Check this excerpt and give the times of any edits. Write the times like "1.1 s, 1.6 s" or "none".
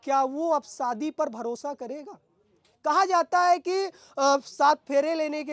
none